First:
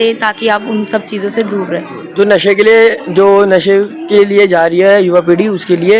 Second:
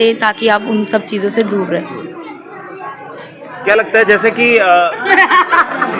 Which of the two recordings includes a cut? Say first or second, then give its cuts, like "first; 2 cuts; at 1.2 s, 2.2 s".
first; 1 cut; at 2.0 s